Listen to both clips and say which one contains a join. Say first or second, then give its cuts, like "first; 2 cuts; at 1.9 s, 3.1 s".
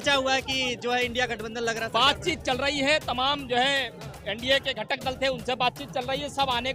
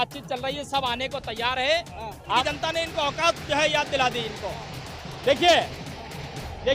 second; 1 cut; at 2.4 s